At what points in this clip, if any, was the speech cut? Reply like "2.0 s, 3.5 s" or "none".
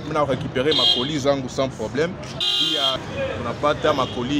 3.0 s